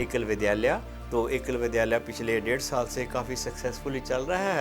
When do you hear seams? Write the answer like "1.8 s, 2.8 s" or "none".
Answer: 0.9 s

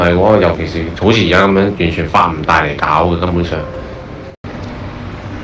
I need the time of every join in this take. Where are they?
4.4 s

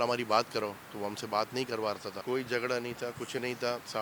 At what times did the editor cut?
2.2 s

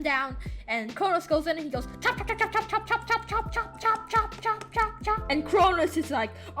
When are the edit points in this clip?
5.2 s

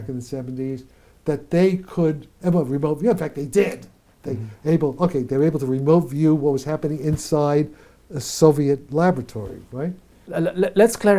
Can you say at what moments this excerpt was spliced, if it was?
none

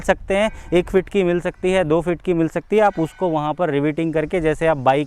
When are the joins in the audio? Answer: none

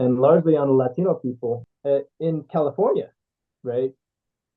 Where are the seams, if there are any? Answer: 1.7 s

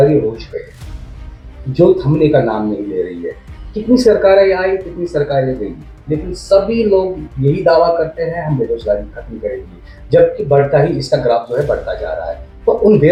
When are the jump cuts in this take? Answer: none

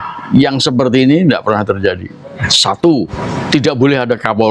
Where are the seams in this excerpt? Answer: 2.5 s, 3.2 s

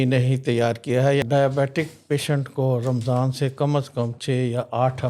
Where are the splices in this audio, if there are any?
1.2 s

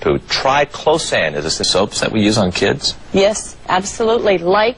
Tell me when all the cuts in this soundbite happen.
none

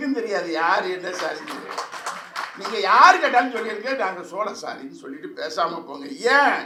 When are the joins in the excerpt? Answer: none

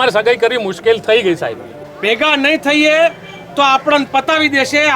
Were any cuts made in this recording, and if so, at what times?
1.7 s

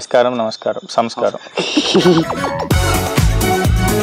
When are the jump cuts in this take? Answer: 2.5 s

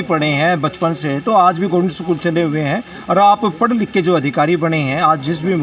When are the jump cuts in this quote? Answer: none

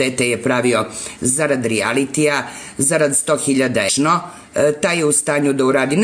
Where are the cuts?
none

